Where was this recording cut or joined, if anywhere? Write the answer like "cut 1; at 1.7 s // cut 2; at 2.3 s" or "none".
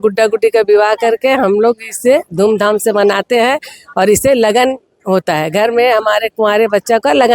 none